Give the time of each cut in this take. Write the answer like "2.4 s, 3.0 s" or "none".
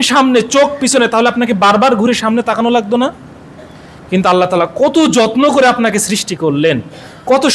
none